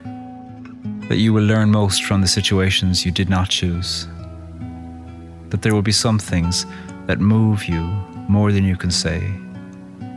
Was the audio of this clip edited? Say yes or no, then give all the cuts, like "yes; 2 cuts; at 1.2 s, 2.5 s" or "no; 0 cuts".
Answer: yes; 1 cut; at 0.9 s